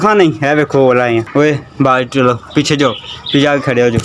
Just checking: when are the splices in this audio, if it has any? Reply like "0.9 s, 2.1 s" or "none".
1.3 s